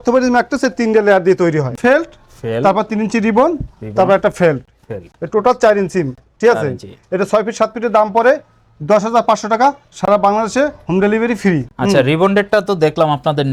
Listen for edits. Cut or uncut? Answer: uncut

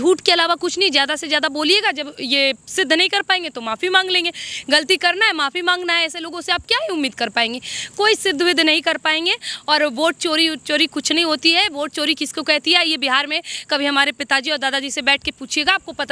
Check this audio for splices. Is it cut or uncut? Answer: uncut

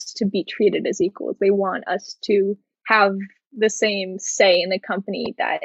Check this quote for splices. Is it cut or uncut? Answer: cut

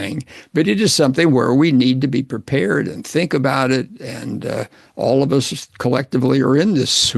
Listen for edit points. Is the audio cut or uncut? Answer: uncut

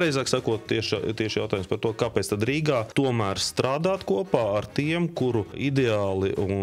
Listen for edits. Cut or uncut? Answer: uncut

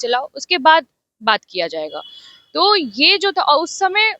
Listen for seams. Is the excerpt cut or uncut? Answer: uncut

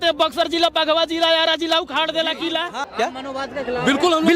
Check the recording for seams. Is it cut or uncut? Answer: cut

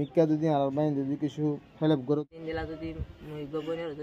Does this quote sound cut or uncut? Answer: cut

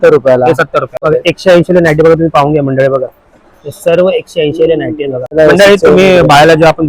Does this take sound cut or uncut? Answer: cut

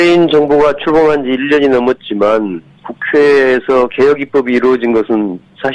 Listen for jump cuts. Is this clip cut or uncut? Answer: uncut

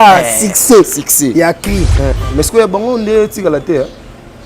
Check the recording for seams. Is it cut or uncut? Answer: cut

